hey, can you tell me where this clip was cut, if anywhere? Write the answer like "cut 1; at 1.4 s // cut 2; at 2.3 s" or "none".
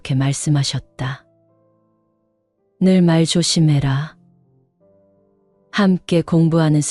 cut 1; at 4.1 s // cut 2; at 5.7 s